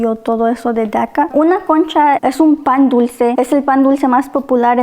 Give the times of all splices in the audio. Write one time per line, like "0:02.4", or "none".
0:01.3
0:02.2
0:03.3

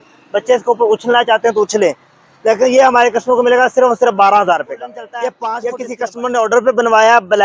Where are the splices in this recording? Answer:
0:05.5

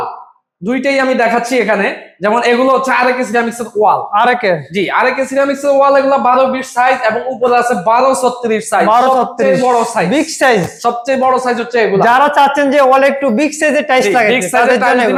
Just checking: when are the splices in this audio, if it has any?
none

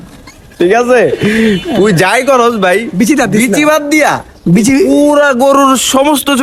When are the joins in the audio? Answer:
none

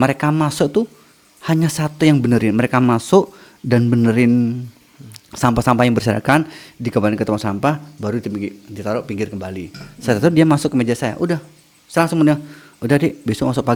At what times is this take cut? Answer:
none

